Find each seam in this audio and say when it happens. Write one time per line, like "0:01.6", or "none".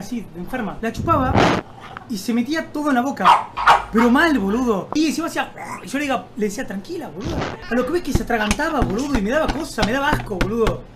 none